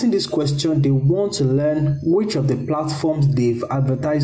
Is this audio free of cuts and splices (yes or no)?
yes